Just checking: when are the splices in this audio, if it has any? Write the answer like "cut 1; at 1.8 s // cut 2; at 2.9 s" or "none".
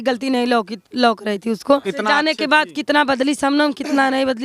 cut 1; at 1.9 s